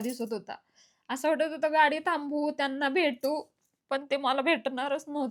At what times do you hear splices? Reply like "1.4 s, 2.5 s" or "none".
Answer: none